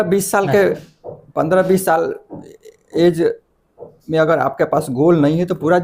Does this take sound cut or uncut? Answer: uncut